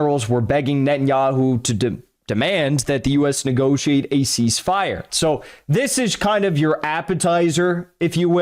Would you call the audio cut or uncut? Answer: cut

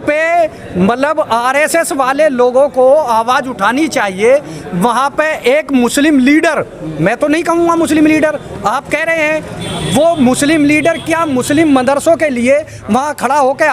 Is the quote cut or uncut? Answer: uncut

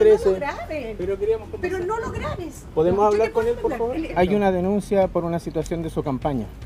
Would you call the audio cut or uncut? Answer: cut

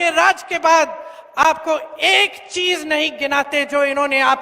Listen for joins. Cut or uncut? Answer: uncut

